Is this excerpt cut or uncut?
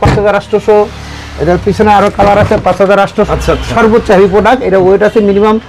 cut